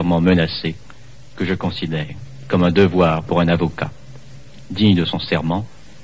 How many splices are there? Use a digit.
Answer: 0